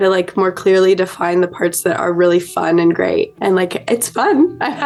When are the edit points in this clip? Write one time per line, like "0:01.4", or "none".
none

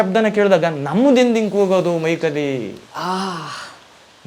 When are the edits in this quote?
none

